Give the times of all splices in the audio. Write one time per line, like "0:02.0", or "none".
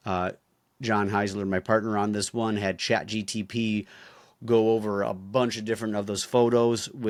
none